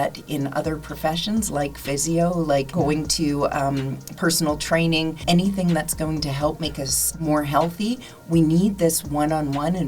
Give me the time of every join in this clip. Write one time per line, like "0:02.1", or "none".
0:02.7
0:05.2
0:07.1